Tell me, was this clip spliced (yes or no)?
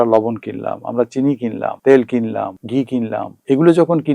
yes